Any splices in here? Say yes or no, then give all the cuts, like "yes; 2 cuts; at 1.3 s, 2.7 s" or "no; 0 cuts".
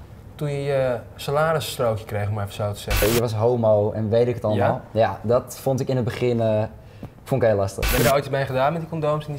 yes; 2 cuts; at 3.0 s, 8.0 s